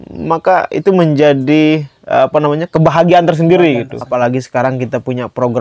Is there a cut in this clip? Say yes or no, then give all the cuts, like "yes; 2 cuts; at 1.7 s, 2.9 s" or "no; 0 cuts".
yes; 1 cut; at 4.0 s